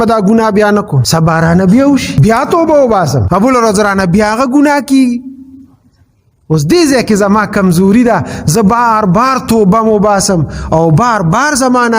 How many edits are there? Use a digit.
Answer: 3